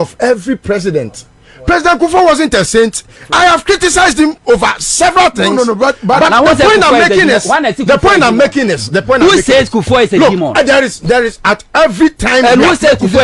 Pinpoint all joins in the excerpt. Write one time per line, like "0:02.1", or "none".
none